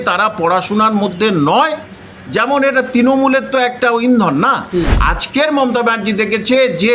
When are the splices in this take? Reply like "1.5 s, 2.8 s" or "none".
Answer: 4.9 s